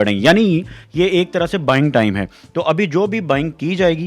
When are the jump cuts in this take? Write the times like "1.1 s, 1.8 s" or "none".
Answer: none